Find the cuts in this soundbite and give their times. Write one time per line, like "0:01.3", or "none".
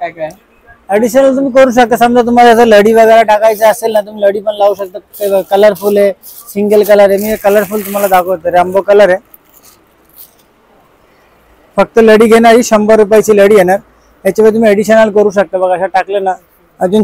none